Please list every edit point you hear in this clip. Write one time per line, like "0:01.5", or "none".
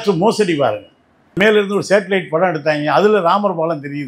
0:01.4